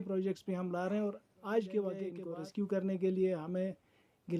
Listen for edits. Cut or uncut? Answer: cut